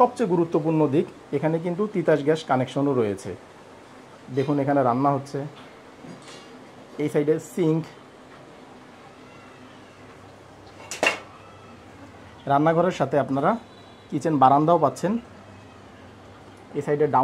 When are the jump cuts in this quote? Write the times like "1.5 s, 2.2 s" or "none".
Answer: none